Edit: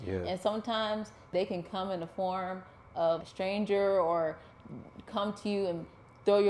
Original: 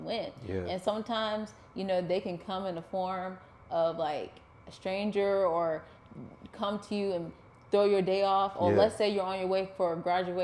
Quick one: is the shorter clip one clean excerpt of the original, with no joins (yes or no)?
no